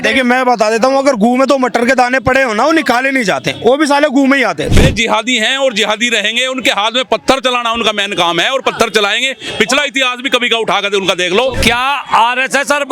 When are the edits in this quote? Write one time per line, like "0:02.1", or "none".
0:04.6
0:11.6

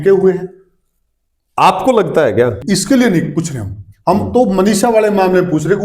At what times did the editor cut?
0:02.6

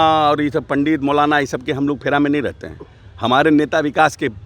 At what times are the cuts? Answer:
none

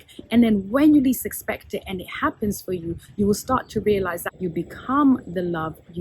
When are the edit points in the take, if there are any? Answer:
0:04.3

